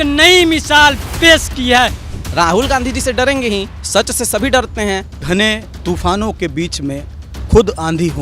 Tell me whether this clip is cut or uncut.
cut